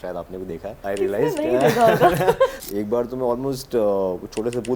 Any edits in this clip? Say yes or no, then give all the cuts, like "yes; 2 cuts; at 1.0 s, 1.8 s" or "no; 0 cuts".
yes; 2 cuts; at 0.8 s, 2.6 s